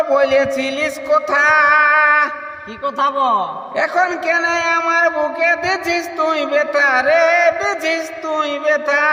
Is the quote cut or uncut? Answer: uncut